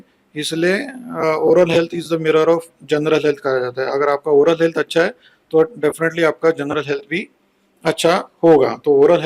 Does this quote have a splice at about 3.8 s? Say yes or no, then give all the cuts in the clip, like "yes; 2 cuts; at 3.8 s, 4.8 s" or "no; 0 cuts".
no; 0 cuts